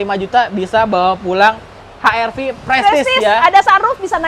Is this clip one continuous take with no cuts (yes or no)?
yes